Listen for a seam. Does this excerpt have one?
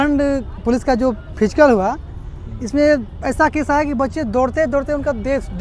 no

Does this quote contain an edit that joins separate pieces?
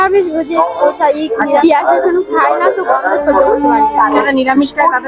yes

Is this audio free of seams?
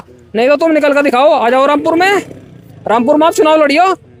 yes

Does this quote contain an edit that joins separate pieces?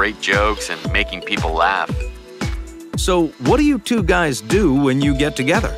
yes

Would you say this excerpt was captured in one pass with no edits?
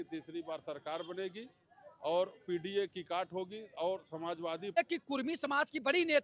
no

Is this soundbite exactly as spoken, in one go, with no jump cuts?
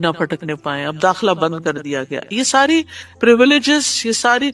yes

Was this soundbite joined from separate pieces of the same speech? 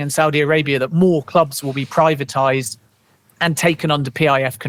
no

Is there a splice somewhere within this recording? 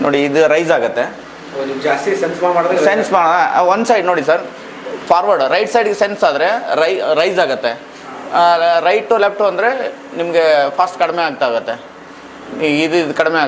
no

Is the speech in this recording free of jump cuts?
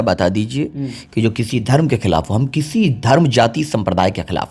yes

